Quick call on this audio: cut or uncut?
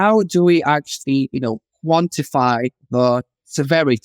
uncut